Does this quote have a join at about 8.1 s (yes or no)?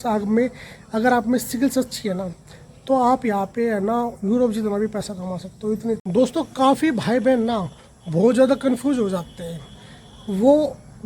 no